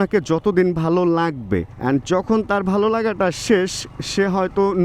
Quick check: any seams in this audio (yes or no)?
yes